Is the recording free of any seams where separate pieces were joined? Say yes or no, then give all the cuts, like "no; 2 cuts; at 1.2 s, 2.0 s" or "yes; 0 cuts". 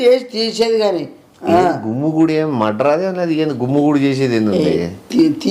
yes; 0 cuts